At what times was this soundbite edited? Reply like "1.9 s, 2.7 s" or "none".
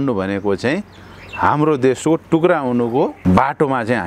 3.2 s